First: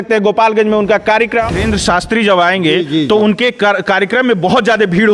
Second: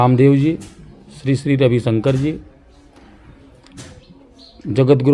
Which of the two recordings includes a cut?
first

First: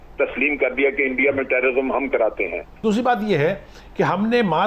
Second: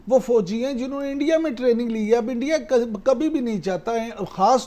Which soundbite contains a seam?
first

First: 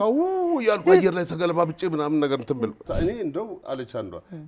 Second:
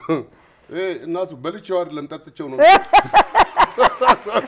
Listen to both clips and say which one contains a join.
first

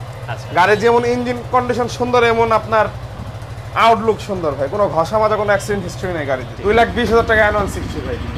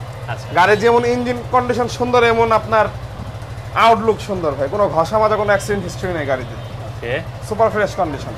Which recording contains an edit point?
first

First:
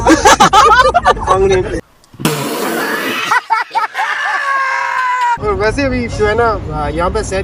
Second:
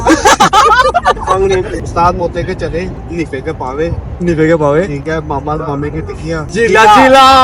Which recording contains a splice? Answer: second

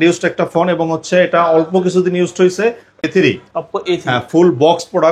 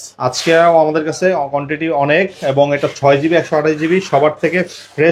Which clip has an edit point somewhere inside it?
first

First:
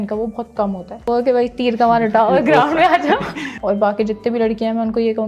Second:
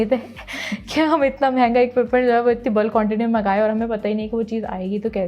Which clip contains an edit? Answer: first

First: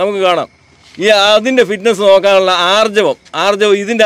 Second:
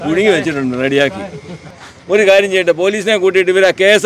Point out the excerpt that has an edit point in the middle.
second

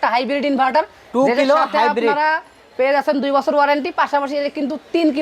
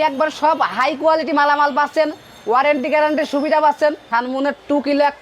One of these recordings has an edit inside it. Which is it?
second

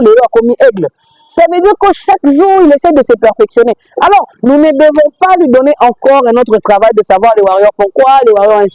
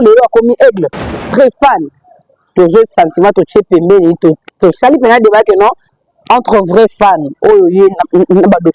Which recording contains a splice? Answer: second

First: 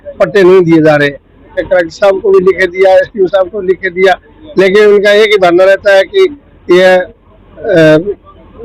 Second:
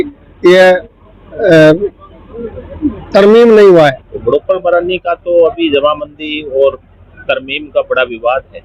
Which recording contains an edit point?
second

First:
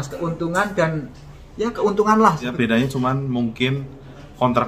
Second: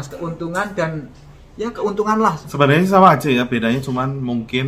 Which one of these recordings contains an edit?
first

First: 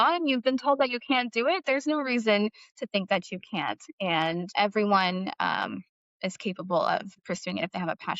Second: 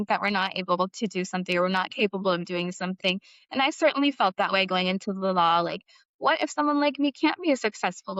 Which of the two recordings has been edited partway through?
first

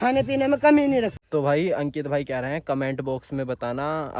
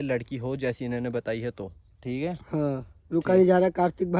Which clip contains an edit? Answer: first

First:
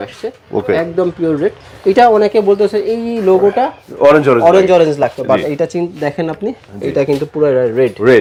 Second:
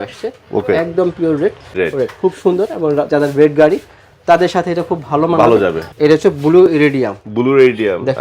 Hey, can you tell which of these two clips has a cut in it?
second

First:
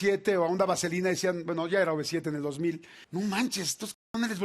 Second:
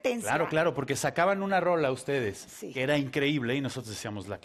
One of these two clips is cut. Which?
first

